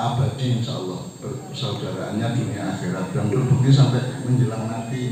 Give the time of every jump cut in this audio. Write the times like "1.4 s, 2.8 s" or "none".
none